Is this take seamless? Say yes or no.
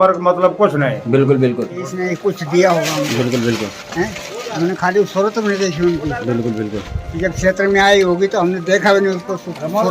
no